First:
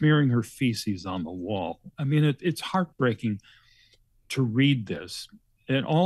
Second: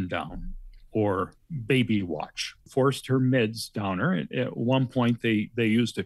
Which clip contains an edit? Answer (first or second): second